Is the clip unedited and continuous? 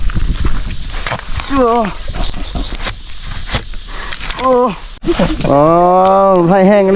no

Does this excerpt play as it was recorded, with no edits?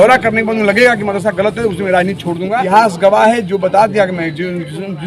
no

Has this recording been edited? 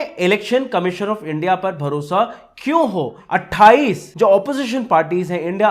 yes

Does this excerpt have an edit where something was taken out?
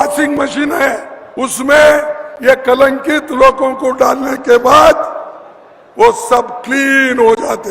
yes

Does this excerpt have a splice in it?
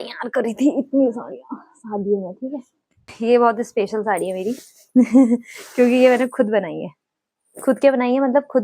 yes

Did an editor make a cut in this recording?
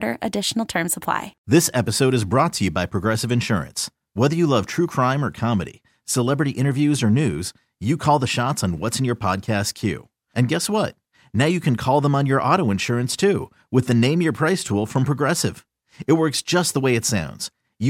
yes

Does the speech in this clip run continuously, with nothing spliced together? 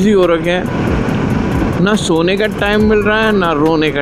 yes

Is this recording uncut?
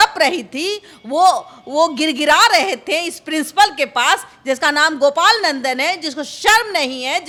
yes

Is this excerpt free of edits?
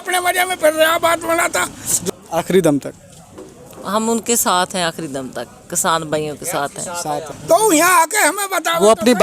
no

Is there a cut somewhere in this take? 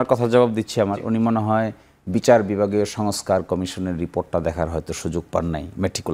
no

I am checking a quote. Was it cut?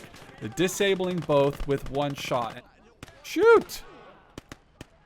yes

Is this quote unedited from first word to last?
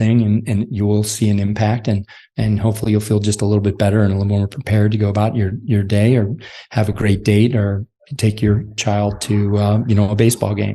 no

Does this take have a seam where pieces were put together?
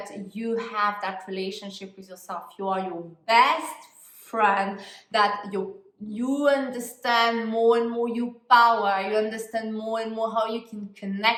no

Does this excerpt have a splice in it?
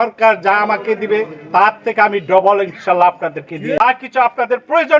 yes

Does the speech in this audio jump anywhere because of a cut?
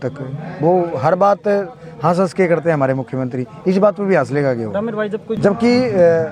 yes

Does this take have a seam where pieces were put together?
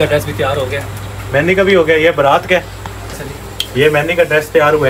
no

